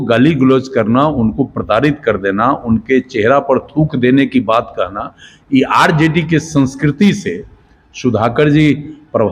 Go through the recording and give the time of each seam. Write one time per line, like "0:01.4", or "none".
none